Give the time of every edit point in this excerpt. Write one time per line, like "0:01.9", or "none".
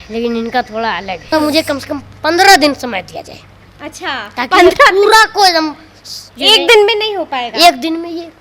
0:01.3